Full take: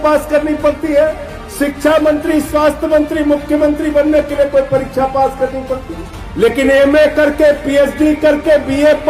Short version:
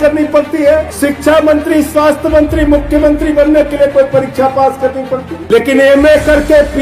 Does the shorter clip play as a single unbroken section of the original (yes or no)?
no